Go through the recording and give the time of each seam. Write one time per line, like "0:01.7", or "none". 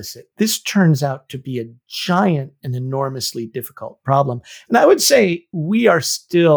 0:05.4